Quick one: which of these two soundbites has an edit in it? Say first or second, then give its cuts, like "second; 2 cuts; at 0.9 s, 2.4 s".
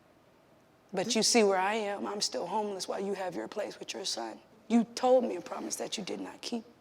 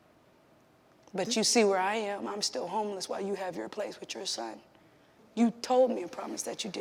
first; 2 cuts; at 0.9 s, 4.5 s